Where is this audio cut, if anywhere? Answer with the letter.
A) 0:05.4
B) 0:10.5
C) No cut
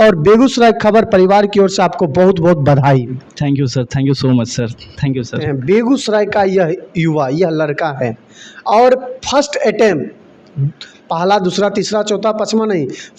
A